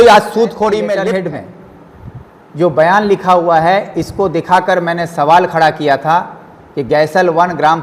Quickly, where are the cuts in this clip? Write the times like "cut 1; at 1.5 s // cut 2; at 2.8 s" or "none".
cut 1; at 1.0 s